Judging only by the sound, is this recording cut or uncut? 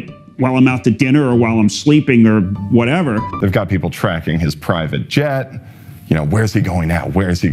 cut